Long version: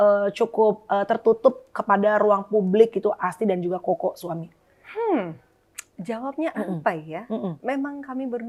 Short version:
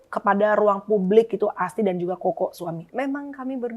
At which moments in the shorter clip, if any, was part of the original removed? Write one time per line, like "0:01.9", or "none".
0:02.9